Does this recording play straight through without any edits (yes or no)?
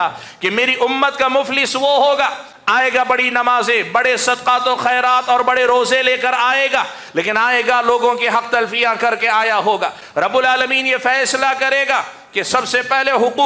yes